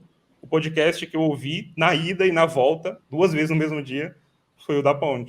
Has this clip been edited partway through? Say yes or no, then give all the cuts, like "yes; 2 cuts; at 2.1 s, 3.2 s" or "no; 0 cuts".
yes; 1 cut; at 3.0 s